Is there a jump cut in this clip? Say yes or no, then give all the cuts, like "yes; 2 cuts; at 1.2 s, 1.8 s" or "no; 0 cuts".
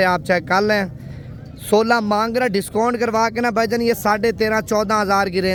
no; 0 cuts